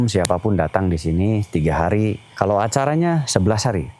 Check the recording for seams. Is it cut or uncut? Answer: cut